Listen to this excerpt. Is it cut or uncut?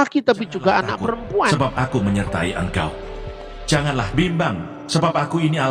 cut